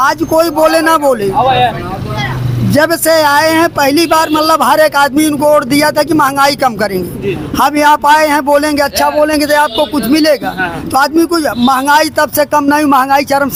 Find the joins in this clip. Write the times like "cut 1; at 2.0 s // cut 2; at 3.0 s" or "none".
none